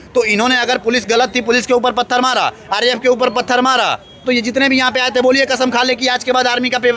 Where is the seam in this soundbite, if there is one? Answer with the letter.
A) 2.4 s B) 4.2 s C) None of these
B